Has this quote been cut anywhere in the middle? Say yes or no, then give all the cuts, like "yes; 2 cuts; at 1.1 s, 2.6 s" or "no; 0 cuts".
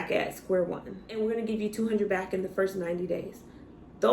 yes; 1 cut; at 1.1 s